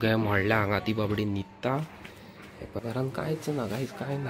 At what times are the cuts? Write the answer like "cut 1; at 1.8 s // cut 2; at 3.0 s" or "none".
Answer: cut 1; at 2.8 s